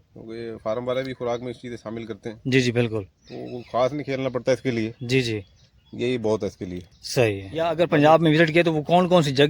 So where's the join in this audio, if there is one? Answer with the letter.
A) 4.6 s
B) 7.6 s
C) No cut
B